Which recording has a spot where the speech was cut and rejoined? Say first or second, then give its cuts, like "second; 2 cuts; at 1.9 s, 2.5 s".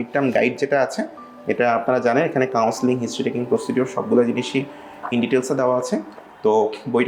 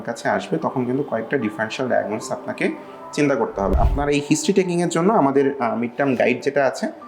second; 1 cut; at 3.7 s